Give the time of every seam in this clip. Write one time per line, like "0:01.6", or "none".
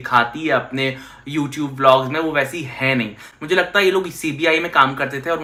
none